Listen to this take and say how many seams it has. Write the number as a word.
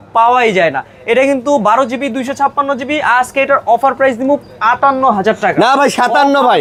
zero